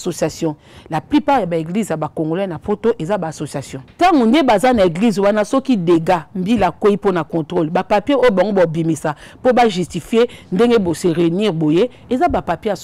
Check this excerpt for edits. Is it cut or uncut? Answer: cut